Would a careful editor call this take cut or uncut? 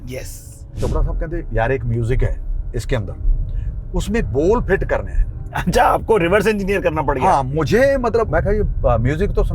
cut